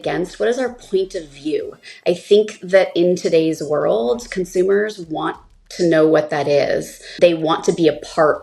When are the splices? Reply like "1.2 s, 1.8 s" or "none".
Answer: 7.1 s